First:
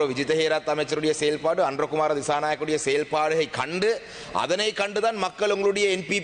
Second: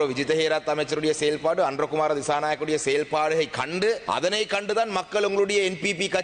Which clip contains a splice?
second; 1 cut; at 4.0 s

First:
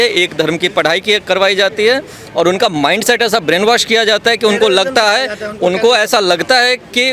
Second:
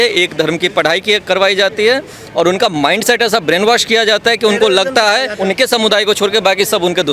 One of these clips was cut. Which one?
second; 1 cut; at 5.3 s

